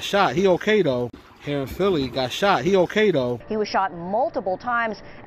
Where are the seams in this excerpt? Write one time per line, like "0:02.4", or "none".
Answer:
none